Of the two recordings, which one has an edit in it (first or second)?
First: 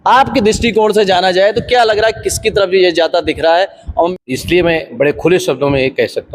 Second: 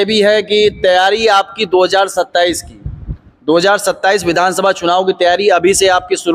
first